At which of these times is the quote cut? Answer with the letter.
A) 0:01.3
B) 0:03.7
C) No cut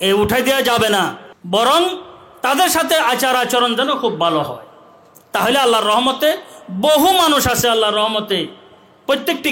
A